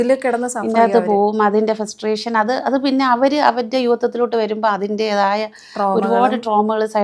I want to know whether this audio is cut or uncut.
uncut